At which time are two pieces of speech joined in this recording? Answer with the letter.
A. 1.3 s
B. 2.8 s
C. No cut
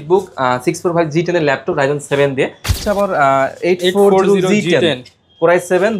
B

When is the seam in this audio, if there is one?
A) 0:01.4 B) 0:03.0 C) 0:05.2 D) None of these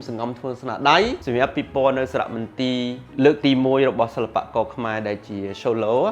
B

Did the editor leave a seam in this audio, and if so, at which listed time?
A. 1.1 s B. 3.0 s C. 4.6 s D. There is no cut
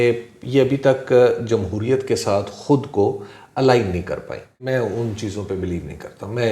C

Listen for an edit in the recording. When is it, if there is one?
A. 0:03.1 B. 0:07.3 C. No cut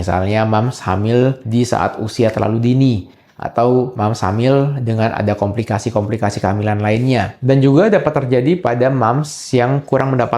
B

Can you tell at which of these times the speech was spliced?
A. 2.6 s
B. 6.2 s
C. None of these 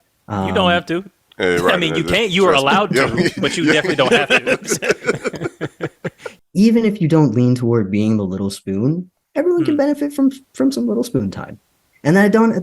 B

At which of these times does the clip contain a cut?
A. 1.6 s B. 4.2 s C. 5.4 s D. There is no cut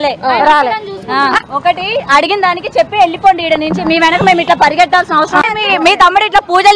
C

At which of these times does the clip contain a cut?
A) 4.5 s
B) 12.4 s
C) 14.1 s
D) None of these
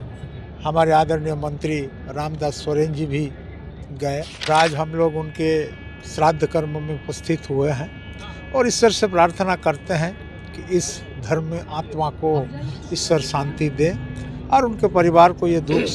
A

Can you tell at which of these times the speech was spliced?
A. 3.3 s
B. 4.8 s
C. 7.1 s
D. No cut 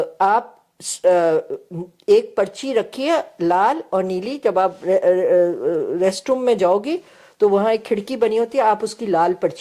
D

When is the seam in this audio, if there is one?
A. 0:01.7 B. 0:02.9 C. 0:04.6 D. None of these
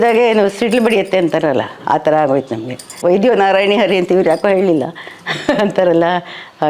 B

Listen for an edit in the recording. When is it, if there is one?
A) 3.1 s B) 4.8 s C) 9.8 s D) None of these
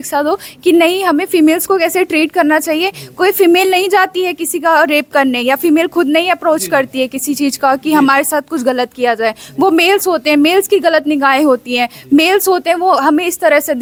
D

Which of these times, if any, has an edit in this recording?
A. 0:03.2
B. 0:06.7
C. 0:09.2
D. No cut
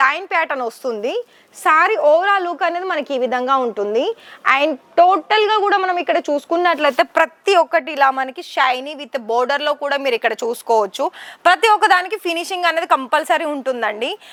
D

